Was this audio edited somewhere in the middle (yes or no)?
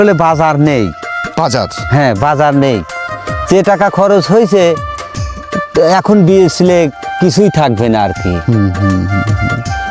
no